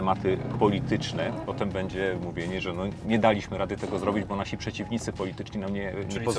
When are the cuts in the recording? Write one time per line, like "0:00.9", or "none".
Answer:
0:01.5